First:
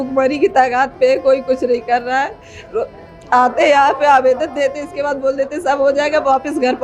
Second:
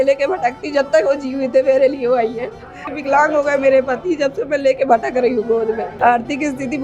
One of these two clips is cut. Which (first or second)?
second